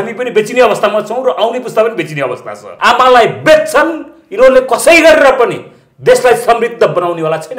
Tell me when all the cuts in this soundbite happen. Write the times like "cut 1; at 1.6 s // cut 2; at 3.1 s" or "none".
cut 1; at 2.6 s